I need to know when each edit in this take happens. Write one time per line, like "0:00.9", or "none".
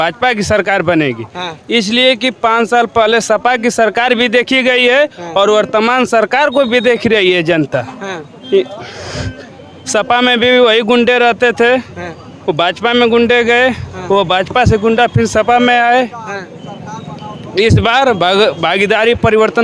none